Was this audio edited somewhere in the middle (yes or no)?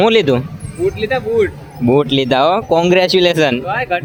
no